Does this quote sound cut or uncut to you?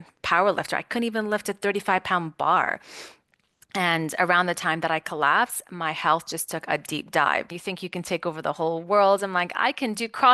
cut